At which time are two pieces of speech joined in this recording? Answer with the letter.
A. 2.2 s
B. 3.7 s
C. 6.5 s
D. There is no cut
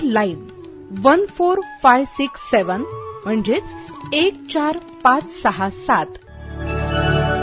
C